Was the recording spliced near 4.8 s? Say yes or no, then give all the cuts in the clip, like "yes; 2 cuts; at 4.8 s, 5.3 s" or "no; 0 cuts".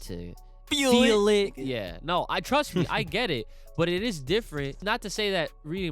yes; 1 cut; at 4.8 s